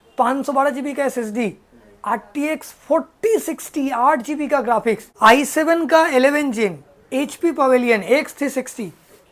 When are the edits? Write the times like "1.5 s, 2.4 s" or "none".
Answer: 5.1 s